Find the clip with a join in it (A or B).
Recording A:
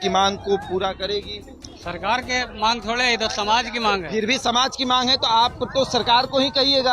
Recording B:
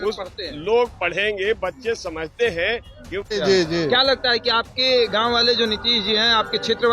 B